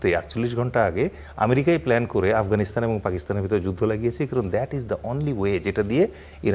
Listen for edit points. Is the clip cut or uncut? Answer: uncut